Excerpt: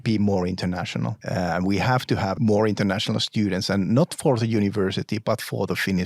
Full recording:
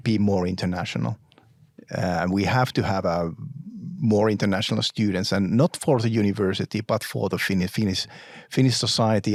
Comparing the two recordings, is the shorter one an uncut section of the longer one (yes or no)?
no